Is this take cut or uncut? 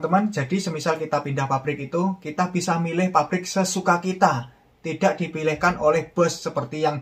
uncut